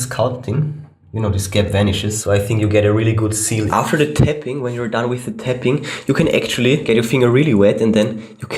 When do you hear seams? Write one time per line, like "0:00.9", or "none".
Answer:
0:02.2
0:03.7
0:06.8